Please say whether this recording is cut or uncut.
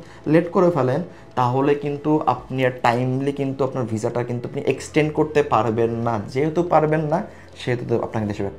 uncut